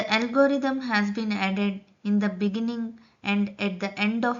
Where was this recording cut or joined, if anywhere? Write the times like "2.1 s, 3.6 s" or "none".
2.5 s